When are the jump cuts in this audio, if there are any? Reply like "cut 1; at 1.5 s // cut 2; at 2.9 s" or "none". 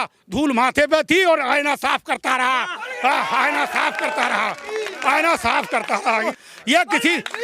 cut 1; at 6.3 s